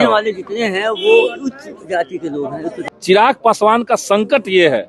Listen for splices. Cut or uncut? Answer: cut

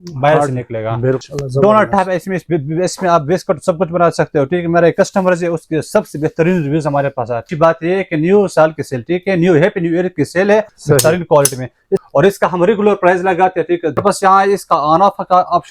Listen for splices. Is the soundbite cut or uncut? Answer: cut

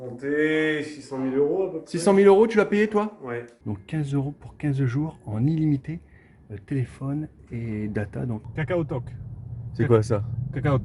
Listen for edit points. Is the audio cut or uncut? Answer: cut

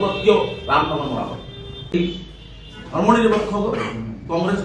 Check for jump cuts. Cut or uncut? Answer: cut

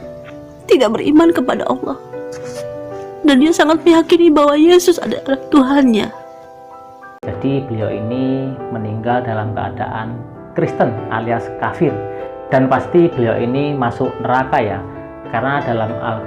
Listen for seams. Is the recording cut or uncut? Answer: cut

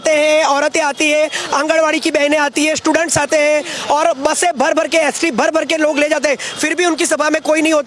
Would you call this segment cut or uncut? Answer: uncut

